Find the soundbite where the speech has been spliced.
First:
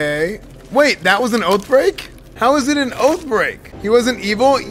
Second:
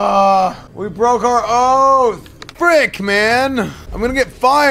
second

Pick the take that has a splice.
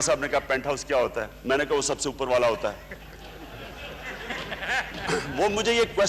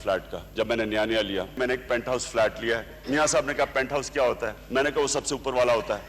second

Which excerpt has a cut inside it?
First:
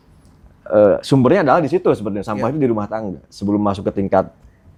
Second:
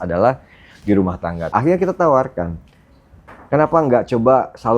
second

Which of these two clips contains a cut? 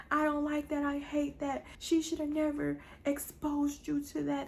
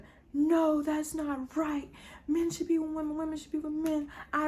first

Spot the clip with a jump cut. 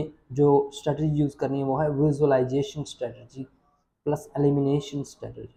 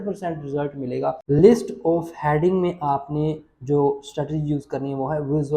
second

